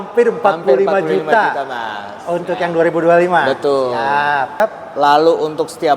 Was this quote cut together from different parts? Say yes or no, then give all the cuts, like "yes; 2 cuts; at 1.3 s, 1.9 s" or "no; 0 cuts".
yes; 1 cut; at 4.6 s